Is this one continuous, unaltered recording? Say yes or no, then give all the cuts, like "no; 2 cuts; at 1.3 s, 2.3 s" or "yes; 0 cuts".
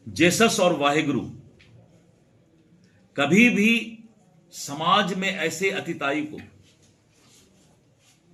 yes; 0 cuts